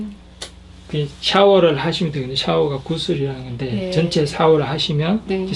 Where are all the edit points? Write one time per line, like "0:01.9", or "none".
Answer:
none